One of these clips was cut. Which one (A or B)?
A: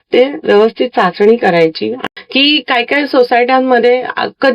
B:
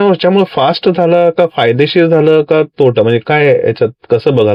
A